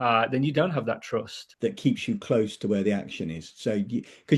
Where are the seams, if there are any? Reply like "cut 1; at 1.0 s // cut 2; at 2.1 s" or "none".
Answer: cut 1; at 1.4 s